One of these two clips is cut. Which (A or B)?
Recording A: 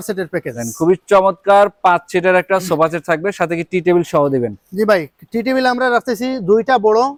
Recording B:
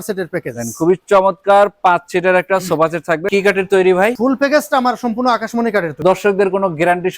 B